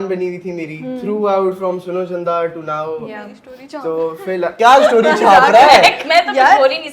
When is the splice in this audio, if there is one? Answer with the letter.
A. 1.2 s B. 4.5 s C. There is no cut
B